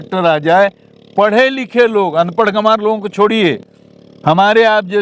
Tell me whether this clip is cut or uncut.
uncut